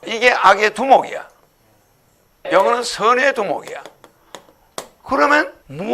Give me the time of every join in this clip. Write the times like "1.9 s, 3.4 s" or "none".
2.3 s, 5.1 s